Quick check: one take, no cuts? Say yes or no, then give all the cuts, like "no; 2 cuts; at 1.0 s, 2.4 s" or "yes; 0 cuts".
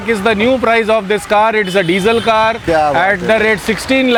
yes; 0 cuts